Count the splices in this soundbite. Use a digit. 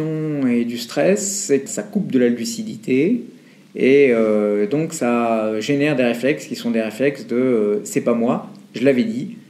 1